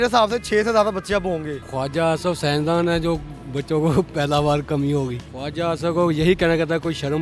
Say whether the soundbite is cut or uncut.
cut